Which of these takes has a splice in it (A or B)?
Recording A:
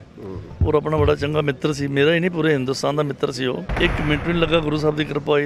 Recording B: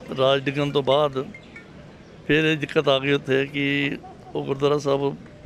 A